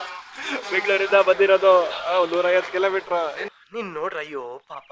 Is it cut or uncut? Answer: uncut